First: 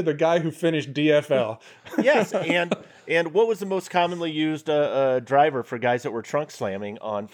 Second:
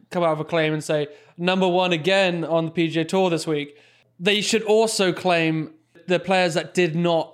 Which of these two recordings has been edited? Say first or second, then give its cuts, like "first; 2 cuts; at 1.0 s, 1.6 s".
second; 1 cut; at 6.0 s